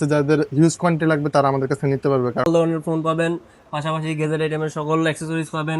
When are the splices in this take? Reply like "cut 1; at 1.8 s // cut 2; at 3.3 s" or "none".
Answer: cut 1; at 2.4 s